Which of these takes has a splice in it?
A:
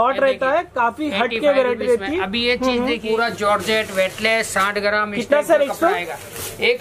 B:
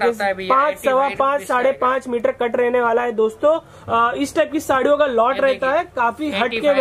A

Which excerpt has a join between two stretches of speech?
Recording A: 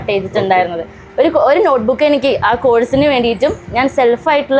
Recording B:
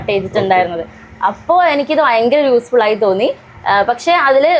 A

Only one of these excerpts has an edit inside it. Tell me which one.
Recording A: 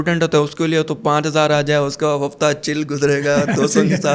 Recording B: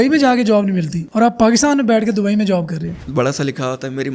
B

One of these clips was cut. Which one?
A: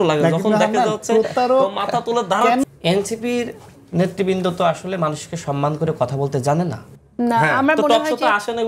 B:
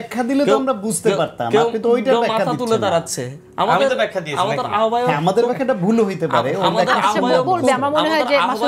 A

